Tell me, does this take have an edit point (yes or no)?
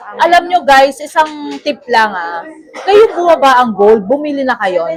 no